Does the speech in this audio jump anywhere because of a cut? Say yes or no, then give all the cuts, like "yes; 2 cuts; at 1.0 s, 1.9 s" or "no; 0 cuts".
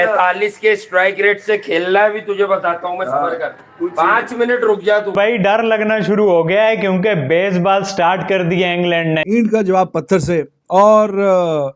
yes; 2 cuts; at 5.2 s, 9.2 s